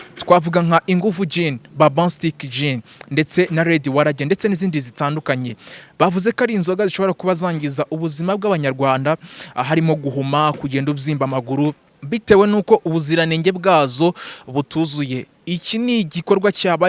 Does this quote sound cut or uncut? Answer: cut